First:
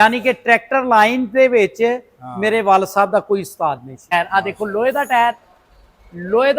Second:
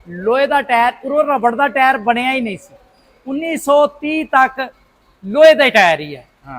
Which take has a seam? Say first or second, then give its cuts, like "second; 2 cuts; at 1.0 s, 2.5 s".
first; 1 cut; at 4.1 s